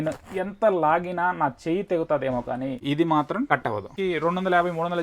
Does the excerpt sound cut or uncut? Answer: cut